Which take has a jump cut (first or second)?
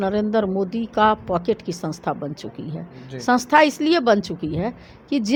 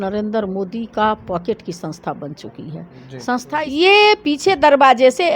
second